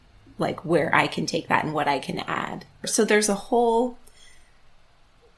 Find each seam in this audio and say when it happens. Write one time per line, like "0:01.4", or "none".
0:02.9